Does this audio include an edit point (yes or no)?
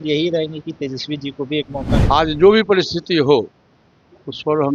yes